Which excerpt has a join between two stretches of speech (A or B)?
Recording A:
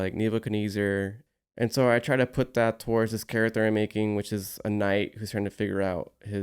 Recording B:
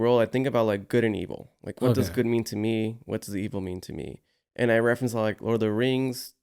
A